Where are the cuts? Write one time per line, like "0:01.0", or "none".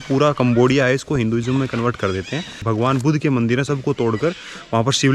0:02.5